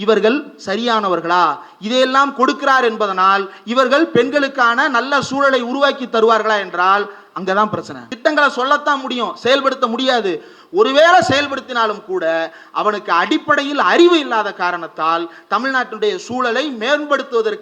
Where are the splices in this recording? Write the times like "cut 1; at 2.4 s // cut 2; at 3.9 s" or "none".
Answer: cut 1; at 7.9 s